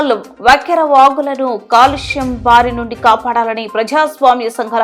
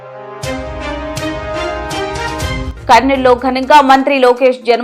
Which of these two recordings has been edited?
second; 2 cuts; at 0.9 s, 2.6 s

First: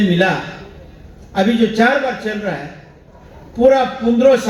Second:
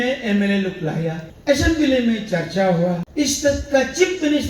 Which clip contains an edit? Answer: second; 2 cuts; at 1.3 s, 3.1 s

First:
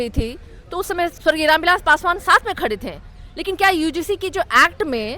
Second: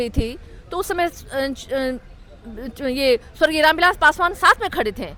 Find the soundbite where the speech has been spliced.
first; 1 cut; at 1.2 s

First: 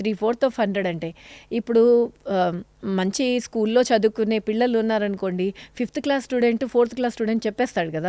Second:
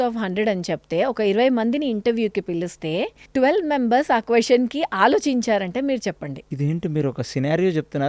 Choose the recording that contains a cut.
second; 2 cuts; at 3.2 s, 6.4 s

